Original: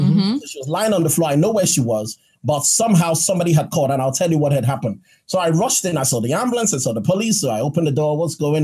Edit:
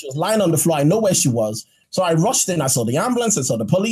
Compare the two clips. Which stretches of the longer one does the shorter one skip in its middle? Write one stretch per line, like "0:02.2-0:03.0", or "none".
0:02.3-0:05.1